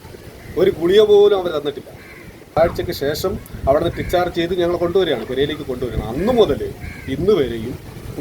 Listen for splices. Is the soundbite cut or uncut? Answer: cut